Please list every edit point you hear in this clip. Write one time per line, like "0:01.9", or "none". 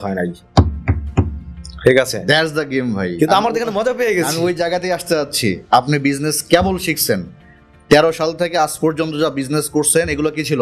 none